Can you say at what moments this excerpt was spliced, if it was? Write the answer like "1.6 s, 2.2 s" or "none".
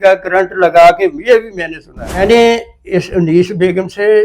2.2 s